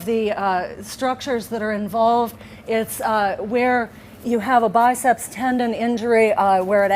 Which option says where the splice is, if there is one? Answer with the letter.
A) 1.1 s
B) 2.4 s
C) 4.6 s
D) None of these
C